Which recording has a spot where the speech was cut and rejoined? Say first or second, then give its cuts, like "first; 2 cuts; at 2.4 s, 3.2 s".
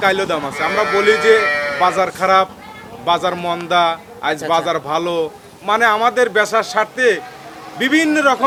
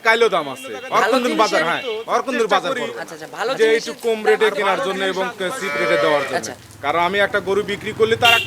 second; 1 cut; at 3.6 s